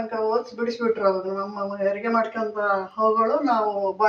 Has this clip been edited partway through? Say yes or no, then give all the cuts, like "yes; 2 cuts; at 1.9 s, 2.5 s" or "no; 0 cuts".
no; 0 cuts